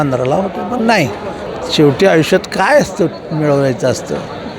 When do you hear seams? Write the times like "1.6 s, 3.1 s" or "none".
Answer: 1.4 s